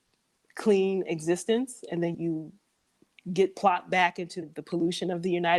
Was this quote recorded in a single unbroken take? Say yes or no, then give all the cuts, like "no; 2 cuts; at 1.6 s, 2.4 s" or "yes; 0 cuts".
no; 2 cuts; at 2.1 s, 4.5 s